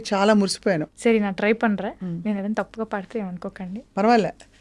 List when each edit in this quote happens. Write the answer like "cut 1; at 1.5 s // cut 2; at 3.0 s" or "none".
cut 1; at 0.9 s